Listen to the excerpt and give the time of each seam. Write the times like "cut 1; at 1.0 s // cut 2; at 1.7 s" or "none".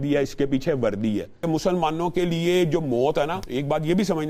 cut 1; at 1.4 s // cut 2; at 3.4 s